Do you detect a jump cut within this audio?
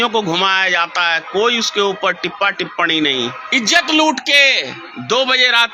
yes; 1 cut; at 3.4 s

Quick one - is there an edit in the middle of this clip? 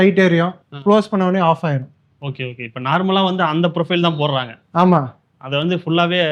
no; 0 cuts

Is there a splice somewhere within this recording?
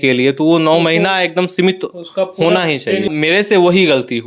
yes; 1 cut; at 3.1 s

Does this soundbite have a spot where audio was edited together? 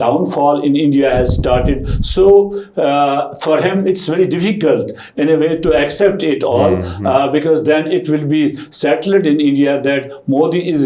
no; 0 cuts

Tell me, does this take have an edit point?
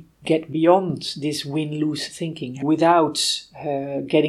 yes; 1 cut; at 2.6 s

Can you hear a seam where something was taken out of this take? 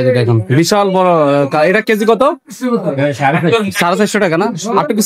no; 0 cuts

